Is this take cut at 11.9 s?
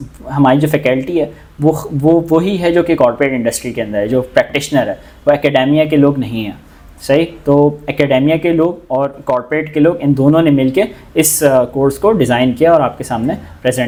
no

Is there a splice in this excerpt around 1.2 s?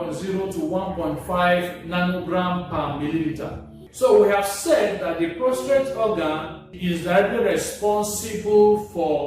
no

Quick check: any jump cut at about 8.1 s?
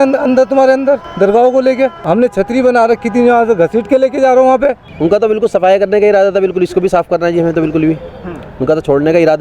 no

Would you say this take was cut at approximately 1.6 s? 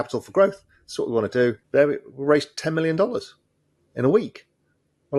yes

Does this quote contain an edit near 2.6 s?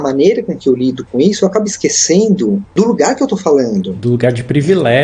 yes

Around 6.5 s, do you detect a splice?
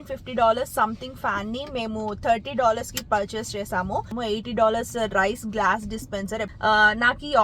yes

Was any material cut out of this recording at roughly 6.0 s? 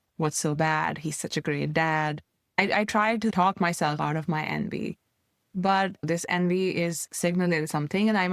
yes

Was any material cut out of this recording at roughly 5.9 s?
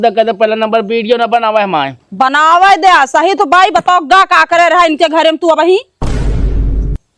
yes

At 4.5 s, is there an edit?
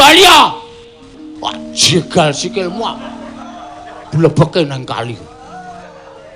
yes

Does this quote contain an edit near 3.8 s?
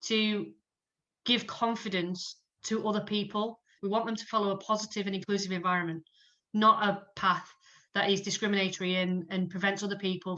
yes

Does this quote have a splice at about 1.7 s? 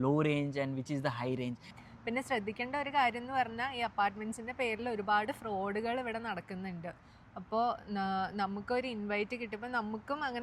yes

